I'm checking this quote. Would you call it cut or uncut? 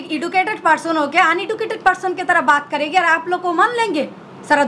uncut